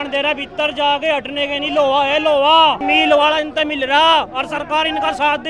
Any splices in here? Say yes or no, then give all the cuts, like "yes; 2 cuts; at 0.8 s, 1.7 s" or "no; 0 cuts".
no; 0 cuts